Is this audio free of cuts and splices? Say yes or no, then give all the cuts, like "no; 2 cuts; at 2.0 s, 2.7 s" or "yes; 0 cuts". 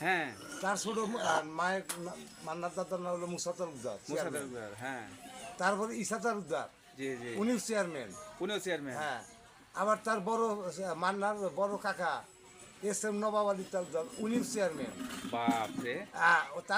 yes; 0 cuts